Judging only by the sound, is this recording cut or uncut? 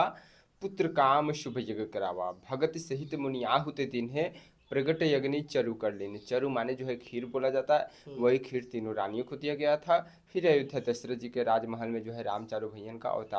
uncut